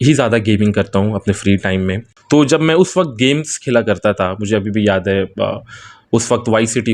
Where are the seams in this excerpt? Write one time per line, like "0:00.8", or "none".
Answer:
0:02.1